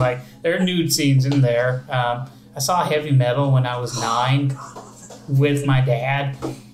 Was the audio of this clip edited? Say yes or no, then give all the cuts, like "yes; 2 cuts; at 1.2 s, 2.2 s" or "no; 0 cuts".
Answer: no; 0 cuts